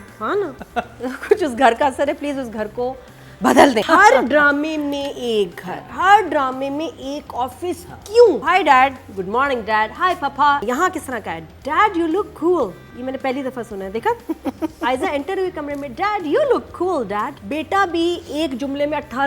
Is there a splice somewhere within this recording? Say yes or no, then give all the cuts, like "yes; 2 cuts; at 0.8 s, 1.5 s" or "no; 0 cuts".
yes; 5 cuts; at 3.9 s, 8.4 s, 10.6 s, 12.9 s, 17.4 s